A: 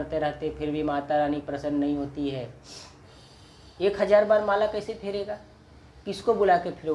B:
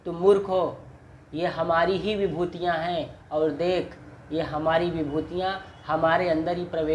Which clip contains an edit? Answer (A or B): A